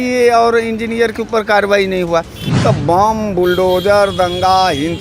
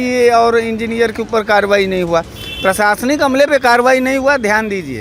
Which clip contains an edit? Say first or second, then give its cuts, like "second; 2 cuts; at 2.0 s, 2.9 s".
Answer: first; 1 cut; at 2.4 s